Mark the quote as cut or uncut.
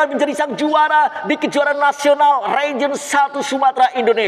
uncut